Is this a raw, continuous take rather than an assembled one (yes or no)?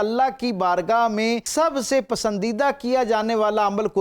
no